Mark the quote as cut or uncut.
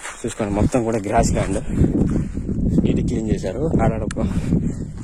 uncut